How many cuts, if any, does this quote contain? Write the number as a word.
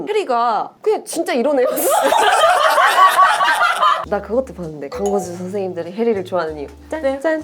one